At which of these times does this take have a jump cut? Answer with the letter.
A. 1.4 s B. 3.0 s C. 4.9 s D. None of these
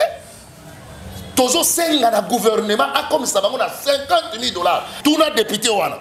C